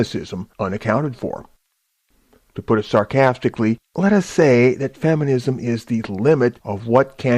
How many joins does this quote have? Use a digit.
1